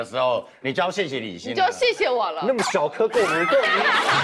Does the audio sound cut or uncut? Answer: uncut